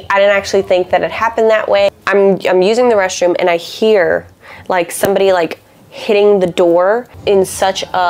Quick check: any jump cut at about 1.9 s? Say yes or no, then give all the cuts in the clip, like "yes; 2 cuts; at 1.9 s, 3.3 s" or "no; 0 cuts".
yes; 2 cuts; at 1.9 s, 7.1 s